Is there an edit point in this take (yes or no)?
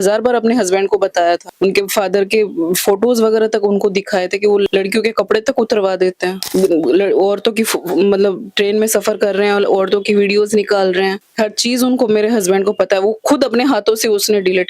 yes